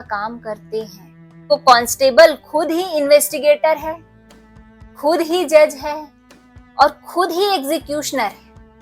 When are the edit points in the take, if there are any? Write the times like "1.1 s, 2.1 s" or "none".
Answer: 1.4 s